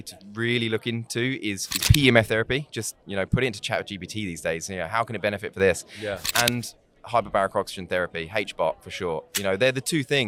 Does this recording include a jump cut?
no; 0 cuts

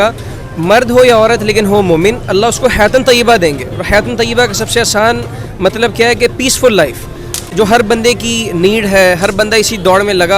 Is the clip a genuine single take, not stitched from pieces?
yes; 0 cuts

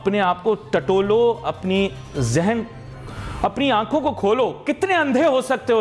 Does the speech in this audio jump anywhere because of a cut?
no; 0 cuts

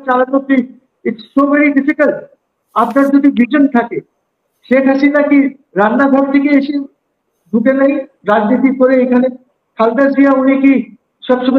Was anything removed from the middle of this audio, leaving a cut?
no; 0 cuts

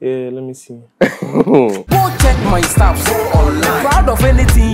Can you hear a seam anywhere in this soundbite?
yes; 1 cut; at 1.8 s

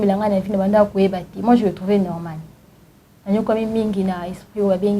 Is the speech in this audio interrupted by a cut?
no; 0 cuts

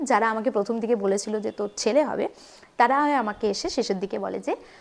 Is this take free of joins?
yes; 0 cuts

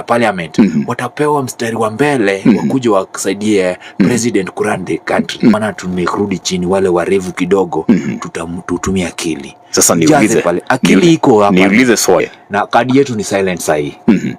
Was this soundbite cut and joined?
yes; 2 cuts; at 5.6 s, 12.4 s

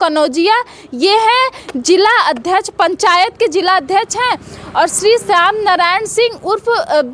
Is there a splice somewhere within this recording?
no; 0 cuts

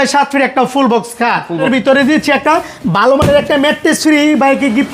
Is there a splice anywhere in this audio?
yes; 1 cut; at 1.6 s

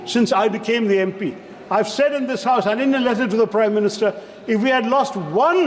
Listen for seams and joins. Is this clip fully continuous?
yes; 0 cuts

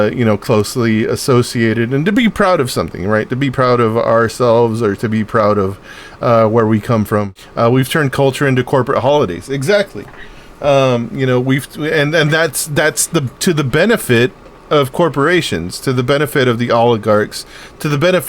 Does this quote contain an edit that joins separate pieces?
yes; 1 cut; at 7.4 s

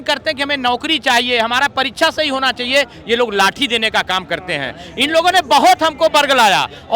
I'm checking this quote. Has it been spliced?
no; 0 cuts

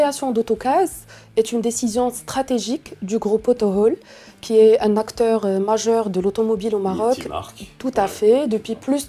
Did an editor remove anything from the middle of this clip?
no; 0 cuts

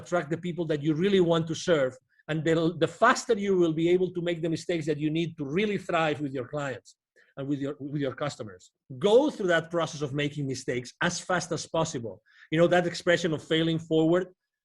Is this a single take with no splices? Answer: no; 1 cut; at 8.8 s

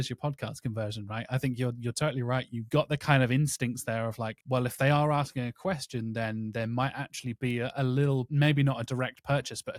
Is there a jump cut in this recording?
no; 0 cuts

